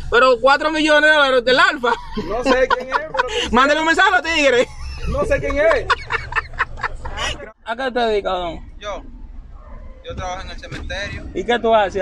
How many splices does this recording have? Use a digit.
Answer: 1